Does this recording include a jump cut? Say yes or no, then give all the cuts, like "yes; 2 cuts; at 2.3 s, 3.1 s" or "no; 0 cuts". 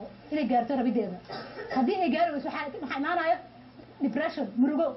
yes; 1 cut; at 2.8 s